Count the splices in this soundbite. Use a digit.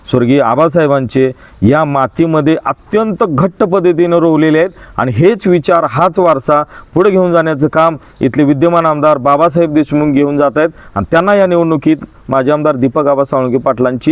0